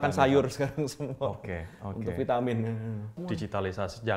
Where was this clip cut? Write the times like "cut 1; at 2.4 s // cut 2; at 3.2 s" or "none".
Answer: cut 1; at 3.2 s